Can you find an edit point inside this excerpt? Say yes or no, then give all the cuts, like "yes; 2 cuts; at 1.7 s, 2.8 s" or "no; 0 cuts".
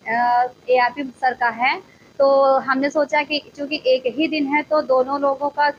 no; 0 cuts